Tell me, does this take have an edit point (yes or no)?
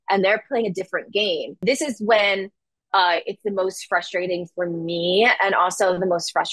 yes